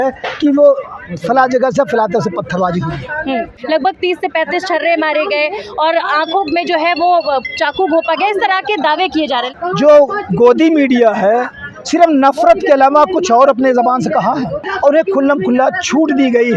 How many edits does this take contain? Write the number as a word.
three